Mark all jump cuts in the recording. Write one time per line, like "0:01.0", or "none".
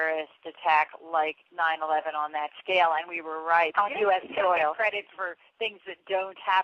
0:02.6